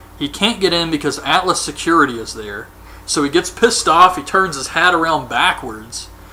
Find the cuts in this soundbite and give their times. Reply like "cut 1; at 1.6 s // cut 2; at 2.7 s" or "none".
none